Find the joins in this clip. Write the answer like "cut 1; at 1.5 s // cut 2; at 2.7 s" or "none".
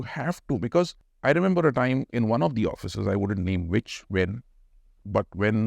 cut 1; at 1.0 s